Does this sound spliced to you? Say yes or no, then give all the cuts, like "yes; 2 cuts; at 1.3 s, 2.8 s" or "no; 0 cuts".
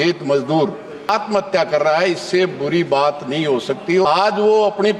yes; 2 cuts; at 1.1 s, 4.0 s